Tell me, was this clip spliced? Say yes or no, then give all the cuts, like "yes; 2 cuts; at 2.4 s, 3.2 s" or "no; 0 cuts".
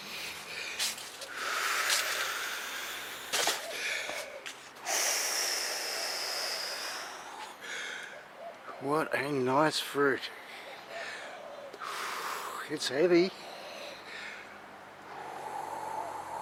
no; 0 cuts